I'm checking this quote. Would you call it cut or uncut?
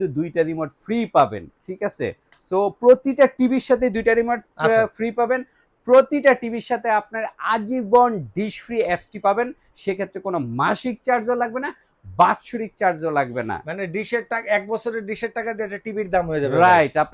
uncut